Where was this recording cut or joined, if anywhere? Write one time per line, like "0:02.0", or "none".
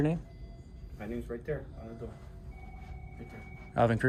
none